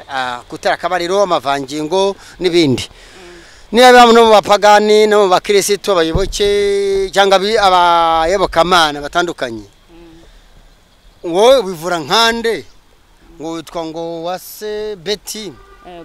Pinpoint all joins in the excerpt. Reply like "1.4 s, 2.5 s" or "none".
none

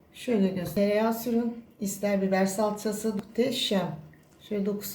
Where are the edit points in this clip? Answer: 0.7 s, 3.2 s

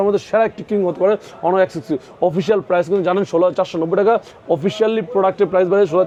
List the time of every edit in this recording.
none

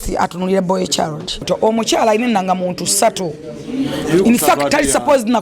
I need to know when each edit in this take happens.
1.4 s

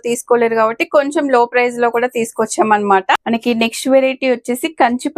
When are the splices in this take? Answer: 3.2 s

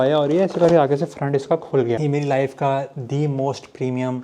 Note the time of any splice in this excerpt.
2.0 s

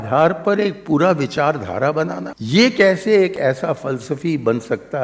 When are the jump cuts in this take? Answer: 2.3 s

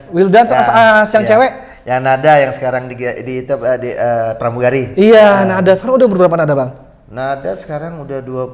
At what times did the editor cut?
none

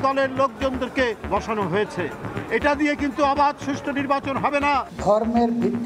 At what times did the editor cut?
1.2 s, 4.9 s

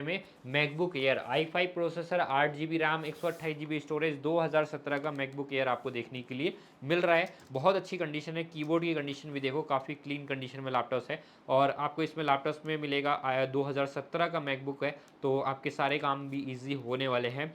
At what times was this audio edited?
none

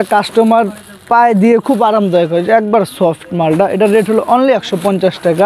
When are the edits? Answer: none

